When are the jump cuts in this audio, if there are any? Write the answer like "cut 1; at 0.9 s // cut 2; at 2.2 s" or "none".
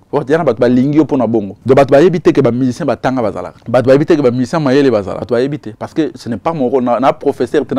cut 1; at 1.5 s // cut 2; at 3.5 s // cut 3; at 5.2 s